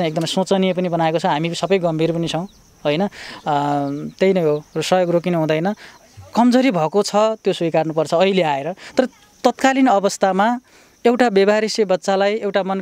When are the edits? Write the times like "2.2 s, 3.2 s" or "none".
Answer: 5.9 s

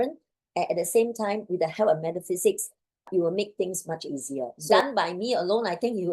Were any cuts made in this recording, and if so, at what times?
4.6 s

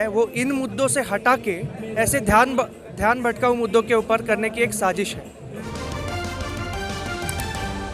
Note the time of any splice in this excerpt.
5.7 s

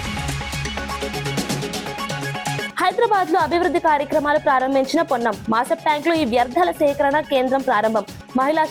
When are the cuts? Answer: 2.6 s

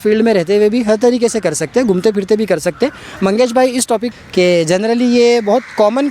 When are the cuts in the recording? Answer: 4.1 s

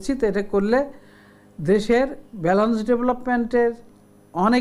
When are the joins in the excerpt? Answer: none

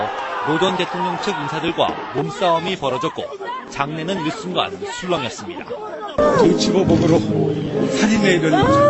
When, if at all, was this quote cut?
6.7 s

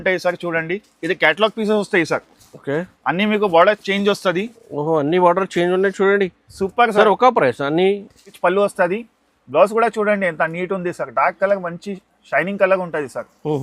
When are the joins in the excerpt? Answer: 8.3 s

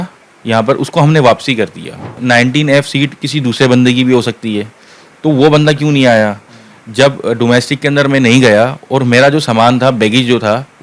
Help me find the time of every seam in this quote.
2.2 s

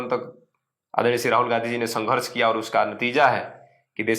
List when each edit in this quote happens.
none

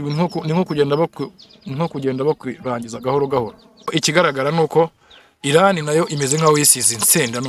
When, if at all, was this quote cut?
3.9 s

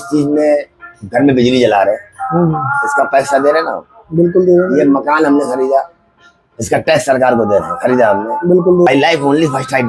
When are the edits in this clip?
8.9 s

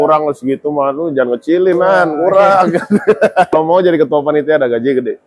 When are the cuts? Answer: 3.5 s

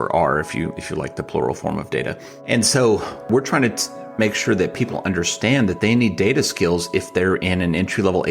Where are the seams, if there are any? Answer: 2.3 s, 3.2 s

